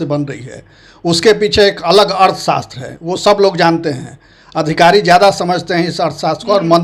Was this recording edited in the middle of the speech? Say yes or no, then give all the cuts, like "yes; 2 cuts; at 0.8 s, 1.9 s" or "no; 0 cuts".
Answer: no; 0 cuts